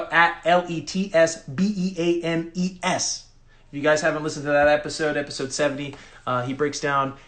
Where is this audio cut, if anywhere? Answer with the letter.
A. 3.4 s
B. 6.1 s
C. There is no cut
C